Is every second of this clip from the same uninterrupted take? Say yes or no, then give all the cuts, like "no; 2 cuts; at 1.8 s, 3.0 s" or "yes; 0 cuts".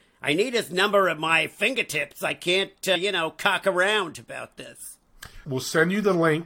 no; 2 cuts; at 3.0 s, 5.3 s